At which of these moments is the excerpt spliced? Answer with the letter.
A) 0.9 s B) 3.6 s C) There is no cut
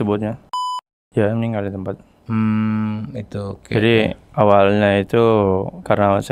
A